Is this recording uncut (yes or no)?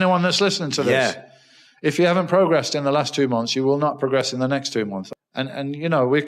no